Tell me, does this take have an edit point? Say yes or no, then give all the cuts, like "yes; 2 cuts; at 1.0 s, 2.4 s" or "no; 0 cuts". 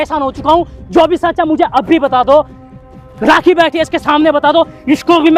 no; 0 cuts